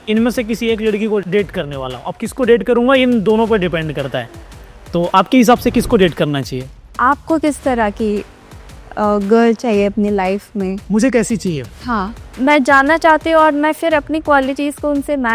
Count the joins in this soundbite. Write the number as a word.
three